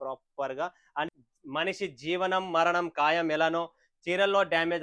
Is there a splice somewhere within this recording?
yes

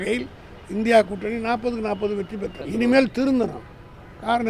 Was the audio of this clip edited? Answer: yes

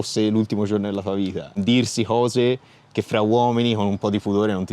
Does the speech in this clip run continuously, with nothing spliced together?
no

